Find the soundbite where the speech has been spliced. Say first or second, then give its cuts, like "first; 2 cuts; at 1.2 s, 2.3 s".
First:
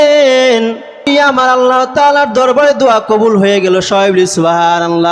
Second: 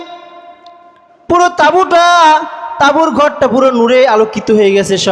first; 1 cut; at 1.1 s